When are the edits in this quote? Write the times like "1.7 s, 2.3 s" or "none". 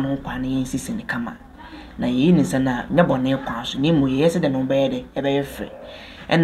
none